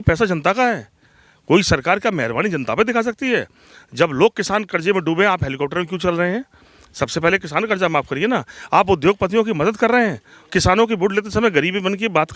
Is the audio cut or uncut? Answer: uncut